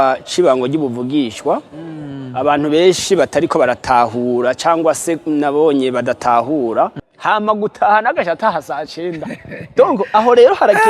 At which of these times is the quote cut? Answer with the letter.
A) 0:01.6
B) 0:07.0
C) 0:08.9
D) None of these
B